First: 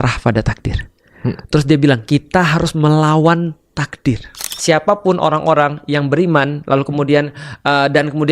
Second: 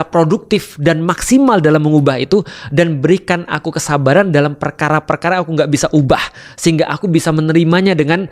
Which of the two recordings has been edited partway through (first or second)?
first